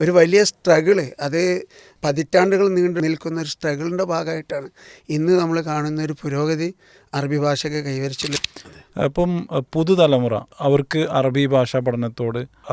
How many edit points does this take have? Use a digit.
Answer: 3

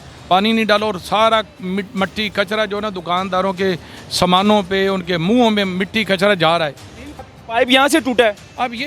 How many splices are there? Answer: 1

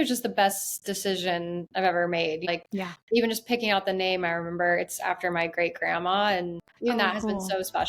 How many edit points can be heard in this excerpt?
2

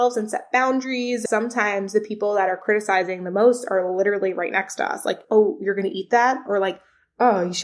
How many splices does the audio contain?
3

